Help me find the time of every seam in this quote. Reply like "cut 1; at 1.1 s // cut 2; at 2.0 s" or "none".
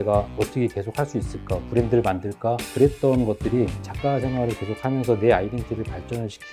cut 1; at 2.7 s // cut 2; at 3.8 s

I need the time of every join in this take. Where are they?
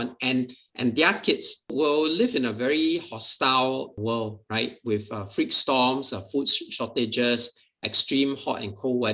cut 1; at 1.7 s // cut 2; at 3.9 s

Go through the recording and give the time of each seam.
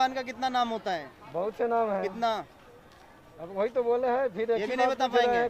none

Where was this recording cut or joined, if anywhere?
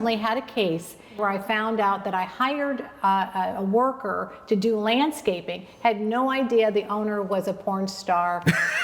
cut 1; at 1.2 s

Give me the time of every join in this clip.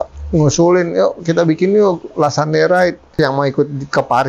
cut 1; at 3.0 s

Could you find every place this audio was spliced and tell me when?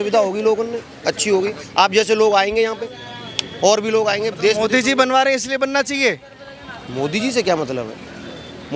none

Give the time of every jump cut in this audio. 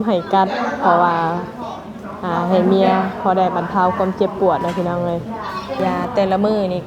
cut 1; at 5.8 s

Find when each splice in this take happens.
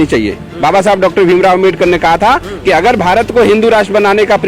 none

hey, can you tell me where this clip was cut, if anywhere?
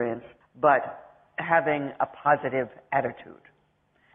cut 1; at 2.4 s

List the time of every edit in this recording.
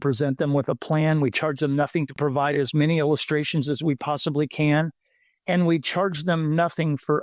cut 1; at 2.1 s

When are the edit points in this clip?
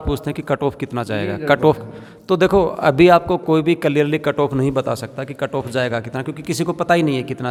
none

